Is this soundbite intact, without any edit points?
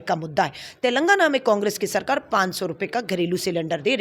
yes; 0 cuts

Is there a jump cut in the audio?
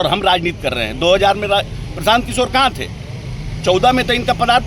no; 0 cuts

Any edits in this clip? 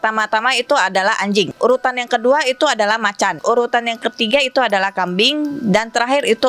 yes; 2 cuts; at 1.5 s, 3.4 s

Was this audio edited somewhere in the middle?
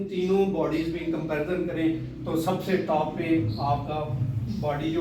no; 0 cuts

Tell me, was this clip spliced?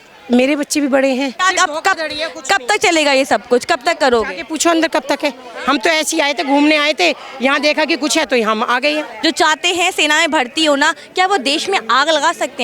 yes; 2 cuts; at 1.3 s, 9.1 s

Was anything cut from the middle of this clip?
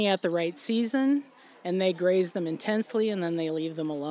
no; 0 cuts

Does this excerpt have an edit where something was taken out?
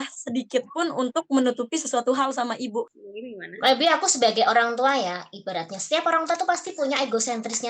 yes; 1 cut; at 2.9 s

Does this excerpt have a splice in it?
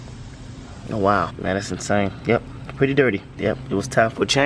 yes; 2 cuts; at 1.3 s, 3.3 s

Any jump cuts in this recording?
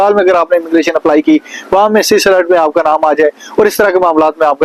no; 0 cuts

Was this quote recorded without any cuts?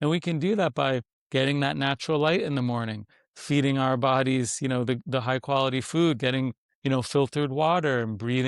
yes; 0 cuts

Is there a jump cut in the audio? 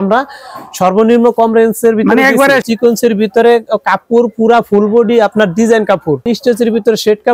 yes; 2 cuts; at 2.6 s, 6.2 s

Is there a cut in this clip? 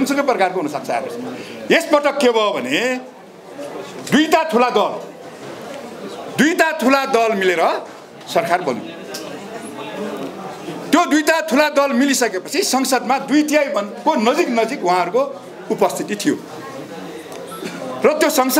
no; 0 cuts

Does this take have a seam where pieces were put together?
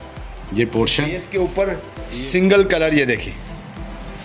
yes; 1 cut; at 1.2 s

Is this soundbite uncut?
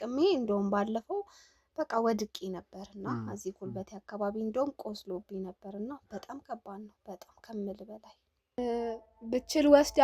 no; 1 cut; at 8.6 s

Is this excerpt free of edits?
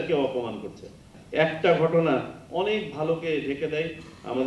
no; 1 cut; at 1.1 s

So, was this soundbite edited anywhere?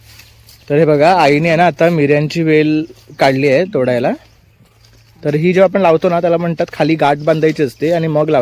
no; 0 cuts

